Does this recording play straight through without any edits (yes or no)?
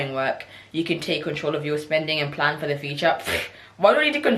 yes